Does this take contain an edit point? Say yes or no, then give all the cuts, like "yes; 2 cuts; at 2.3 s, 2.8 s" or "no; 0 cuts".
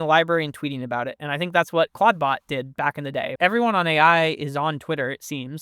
yes; 1 cut; at 3.3 s